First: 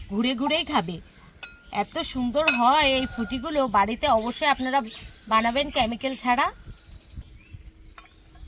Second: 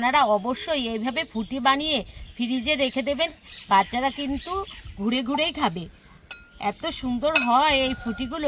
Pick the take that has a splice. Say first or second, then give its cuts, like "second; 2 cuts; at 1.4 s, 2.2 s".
first; 1 cut; at 7.2 s